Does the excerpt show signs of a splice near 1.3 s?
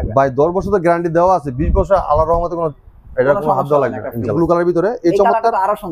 no; 1 cut; at 4.3 s

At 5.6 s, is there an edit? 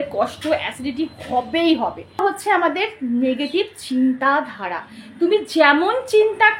no; 1 cut; at 2.2 s

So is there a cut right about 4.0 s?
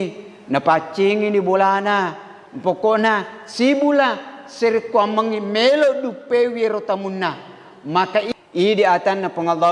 no; 1 cut; at 8.3 s

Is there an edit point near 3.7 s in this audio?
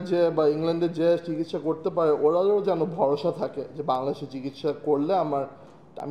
no; 0 cuts

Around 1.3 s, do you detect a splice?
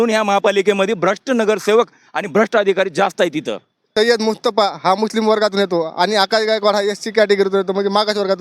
no; 1 cut; at 3.8 s

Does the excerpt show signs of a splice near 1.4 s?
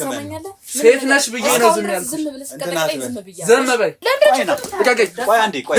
no; 1 cut; at 4.0 s

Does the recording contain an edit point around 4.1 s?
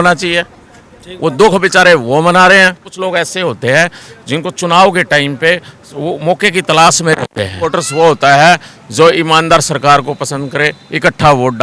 no; 2 cuts; at 2.9 s, 7.7 s

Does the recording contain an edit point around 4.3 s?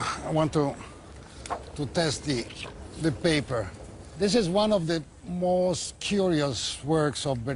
yes; 1 cut; at 4.3 s

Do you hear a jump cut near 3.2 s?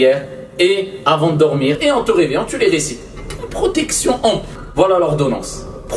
no; 2 cuts; at 1.8 s, 4.5 s

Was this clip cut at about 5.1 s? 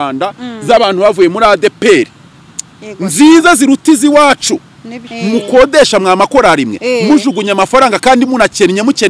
yes; 1 cut; at 5.1 s

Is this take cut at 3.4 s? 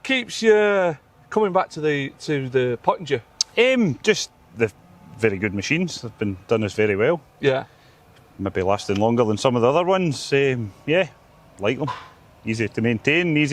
no; 0 cuts

